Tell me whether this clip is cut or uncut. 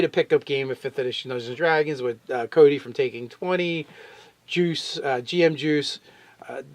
cut